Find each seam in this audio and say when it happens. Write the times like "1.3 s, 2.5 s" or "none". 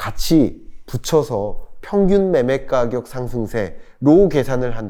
none